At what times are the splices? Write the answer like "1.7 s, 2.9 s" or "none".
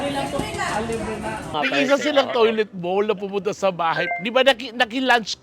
1.5 s